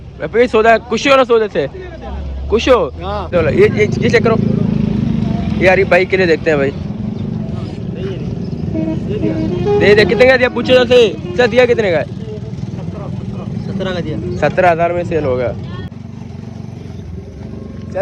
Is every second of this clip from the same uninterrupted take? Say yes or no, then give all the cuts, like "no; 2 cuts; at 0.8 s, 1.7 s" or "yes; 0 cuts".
no; 2 cuts; at 3.3 s, 15.9 s